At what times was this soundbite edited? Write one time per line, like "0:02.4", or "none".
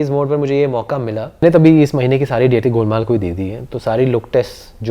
0:01.4

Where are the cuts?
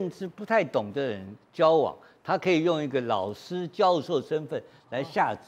none

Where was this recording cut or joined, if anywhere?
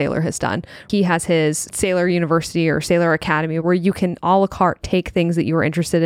0:00.8
0:01.7
0:03.6

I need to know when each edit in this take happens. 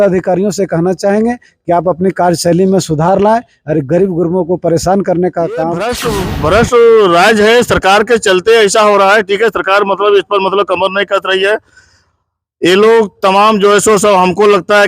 0:06.0

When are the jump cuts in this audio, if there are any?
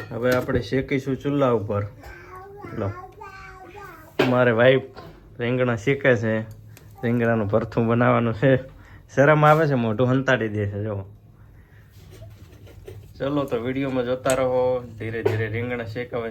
none

